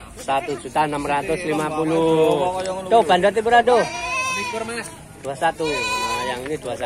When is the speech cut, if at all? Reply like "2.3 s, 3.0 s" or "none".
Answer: none